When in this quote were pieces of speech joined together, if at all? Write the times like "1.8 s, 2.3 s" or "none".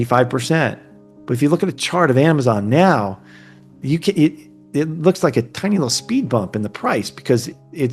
none